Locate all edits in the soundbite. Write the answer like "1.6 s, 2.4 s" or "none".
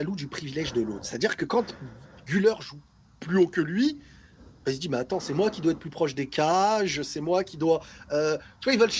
none